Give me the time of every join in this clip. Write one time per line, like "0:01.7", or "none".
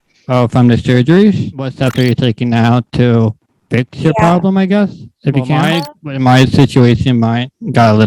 0:01.8
0:05.6